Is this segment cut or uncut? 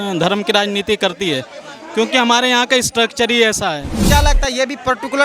cut